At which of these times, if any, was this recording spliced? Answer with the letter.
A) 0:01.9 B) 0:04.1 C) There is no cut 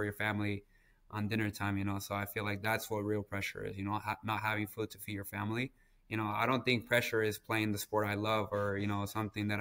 C